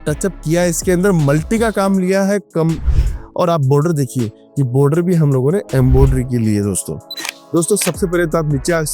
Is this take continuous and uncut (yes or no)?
no